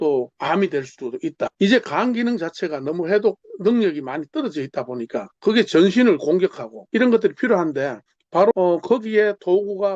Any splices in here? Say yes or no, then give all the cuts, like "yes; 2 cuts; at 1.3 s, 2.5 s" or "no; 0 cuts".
yes; 4 cuts; at 1.5 s, 5.3 s, 6.7 s, 8.5 s